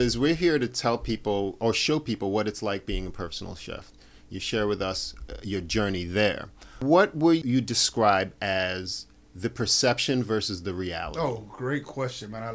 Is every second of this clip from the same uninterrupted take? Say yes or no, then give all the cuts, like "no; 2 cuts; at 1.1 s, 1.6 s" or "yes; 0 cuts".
no; 2 cuts; at 6.8 s, 7.4 s